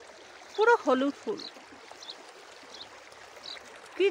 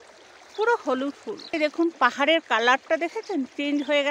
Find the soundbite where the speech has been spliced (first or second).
second